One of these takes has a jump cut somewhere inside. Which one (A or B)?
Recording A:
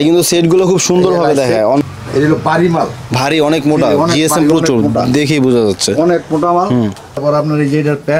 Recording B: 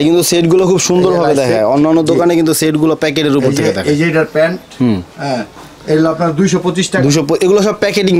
A